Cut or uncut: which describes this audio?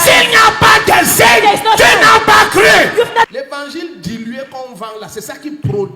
cut